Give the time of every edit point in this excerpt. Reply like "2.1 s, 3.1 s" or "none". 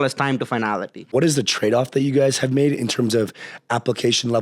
1.1 s

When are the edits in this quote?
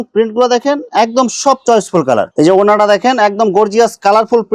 2.3 s

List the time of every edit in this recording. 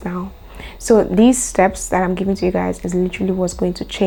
none

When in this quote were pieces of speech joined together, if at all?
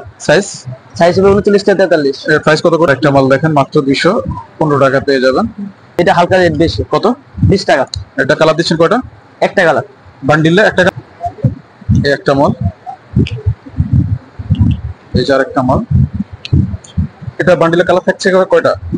2.9 s, 6.0 s, 10.9 s

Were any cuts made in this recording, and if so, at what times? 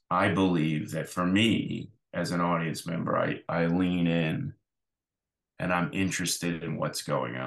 none

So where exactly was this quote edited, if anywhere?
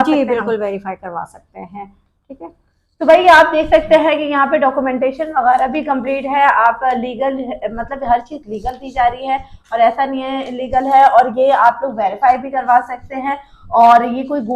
none

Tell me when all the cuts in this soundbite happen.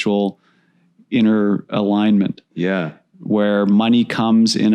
none

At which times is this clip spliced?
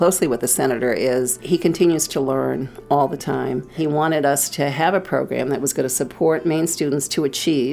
1.4 s, 3.8 s

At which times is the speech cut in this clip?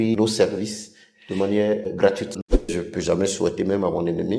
2.6 s

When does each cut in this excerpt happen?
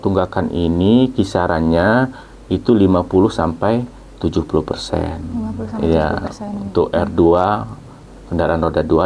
none

